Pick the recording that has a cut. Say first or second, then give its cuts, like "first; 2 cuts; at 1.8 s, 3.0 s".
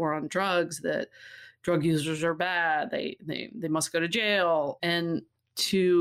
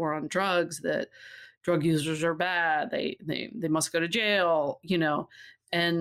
first; 1 cut; at 4.9 s